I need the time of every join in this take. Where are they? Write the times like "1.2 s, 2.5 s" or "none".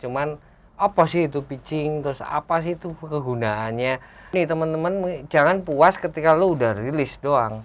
4.2 s